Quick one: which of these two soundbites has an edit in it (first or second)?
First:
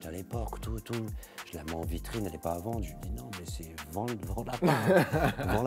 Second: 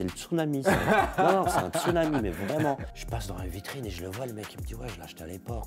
second